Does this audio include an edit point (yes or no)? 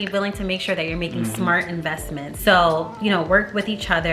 yes